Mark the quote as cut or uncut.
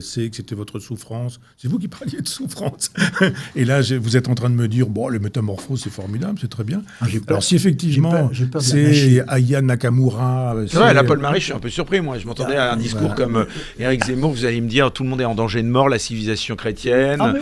uncut